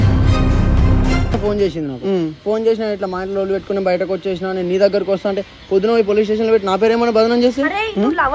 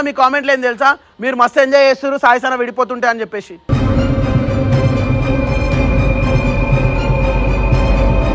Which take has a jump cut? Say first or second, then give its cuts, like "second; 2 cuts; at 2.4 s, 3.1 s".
first; 1 cut; at 1.4 s